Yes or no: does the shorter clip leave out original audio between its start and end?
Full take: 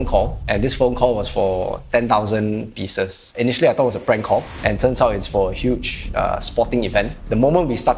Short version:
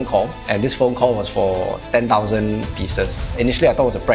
no